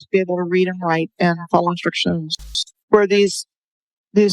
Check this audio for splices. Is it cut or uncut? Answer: cut